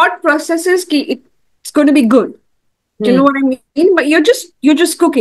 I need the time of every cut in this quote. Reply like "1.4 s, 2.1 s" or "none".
none

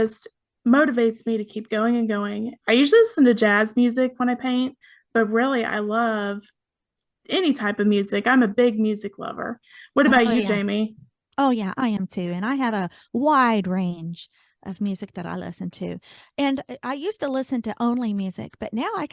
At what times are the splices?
2.5 s

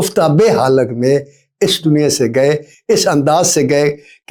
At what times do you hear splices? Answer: none

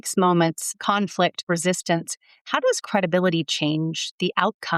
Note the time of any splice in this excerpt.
1.4 s

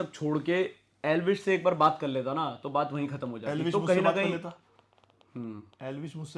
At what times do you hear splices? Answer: none

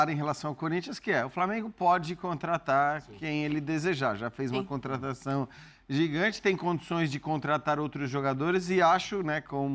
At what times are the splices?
none

